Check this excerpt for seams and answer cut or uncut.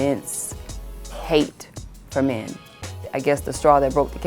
cut